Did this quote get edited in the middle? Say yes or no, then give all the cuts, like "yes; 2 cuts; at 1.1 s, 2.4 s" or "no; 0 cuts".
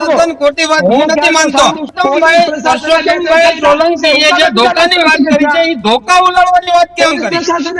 yes; 1 cut; at 1.9 s